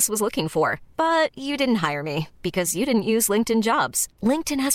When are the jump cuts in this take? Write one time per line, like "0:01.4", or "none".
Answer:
none